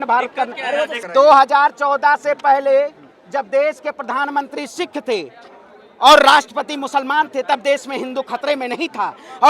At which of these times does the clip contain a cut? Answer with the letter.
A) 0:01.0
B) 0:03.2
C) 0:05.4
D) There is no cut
A